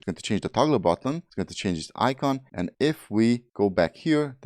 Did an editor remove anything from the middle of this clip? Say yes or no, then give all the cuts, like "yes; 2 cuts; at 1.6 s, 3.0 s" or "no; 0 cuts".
yes; 2 cuts; at 2.7 s, 3.5 s